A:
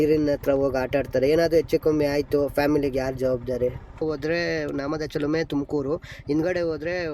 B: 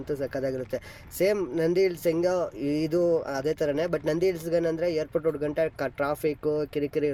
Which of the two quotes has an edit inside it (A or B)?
A